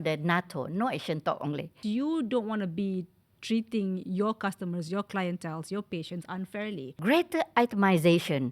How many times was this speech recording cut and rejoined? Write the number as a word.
two